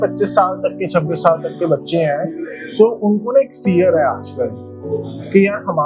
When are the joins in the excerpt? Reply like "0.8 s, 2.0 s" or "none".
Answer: none